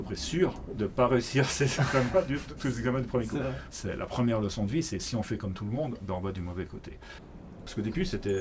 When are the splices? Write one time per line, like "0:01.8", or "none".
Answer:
0:03.6
0:07.2